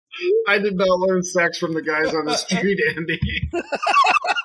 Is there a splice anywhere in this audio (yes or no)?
yes